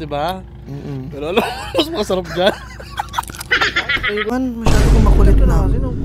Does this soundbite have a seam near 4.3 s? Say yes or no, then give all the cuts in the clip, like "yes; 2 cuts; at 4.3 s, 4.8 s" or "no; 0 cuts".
yes; 1 cut; at 4.3 s